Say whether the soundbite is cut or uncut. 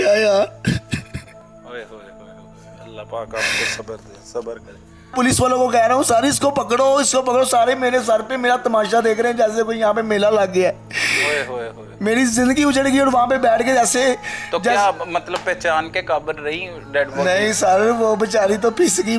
cut